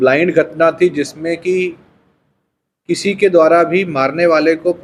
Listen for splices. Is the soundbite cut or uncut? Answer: uncut